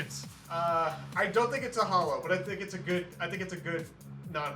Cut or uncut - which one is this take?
uncut